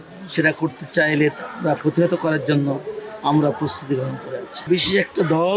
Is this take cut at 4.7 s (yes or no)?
yes